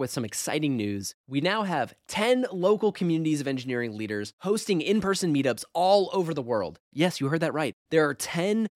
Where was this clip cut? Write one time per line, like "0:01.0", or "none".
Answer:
none